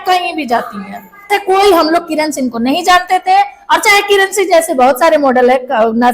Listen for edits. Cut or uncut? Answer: cut